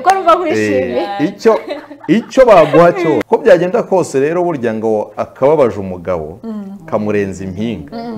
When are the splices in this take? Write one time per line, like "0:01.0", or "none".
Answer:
0:03.2